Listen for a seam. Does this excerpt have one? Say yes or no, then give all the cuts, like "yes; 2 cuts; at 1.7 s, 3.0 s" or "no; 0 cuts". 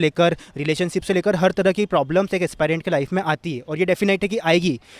no; 0 cuts